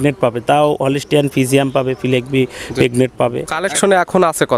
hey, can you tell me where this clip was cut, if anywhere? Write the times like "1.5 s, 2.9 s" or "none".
3.5 s